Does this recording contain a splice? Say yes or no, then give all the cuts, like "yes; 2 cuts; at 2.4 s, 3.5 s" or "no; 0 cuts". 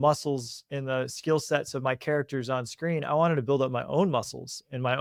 no; 0 cuts